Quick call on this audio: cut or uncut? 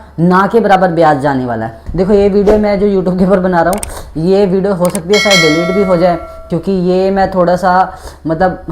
cut